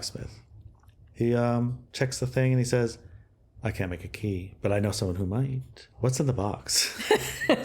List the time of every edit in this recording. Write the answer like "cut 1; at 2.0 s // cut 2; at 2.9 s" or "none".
cut 1; at 5.8 s